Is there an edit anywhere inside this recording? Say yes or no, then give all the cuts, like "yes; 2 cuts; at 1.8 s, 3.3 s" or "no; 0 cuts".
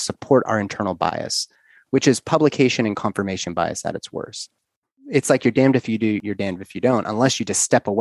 yes; 2 cuts; at 5.0 s, 6.3 s